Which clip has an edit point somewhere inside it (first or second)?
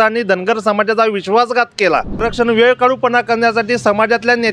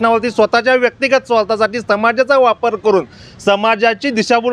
first